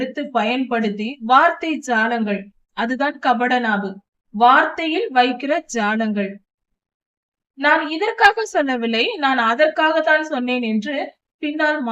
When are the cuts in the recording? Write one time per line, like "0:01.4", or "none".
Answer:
none